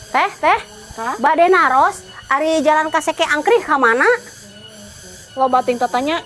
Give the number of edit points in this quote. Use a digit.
0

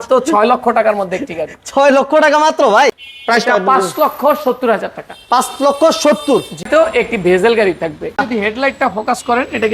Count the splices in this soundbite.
3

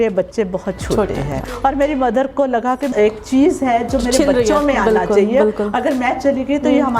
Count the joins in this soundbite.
2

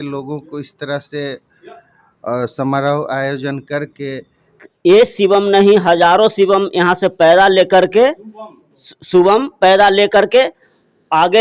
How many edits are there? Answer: 1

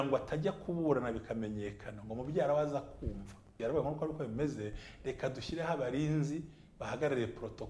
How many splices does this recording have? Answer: 1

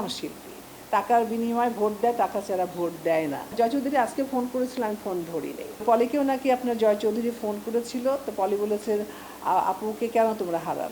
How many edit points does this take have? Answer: 2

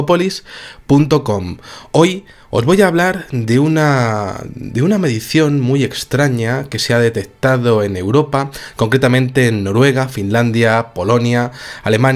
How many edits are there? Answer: 0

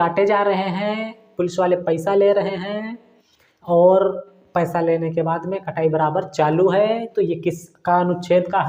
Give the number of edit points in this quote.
0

